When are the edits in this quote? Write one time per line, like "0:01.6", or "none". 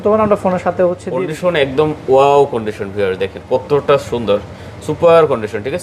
0:01.1